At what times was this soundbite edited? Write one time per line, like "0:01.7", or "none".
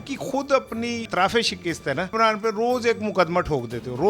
0:01.1
0:02.1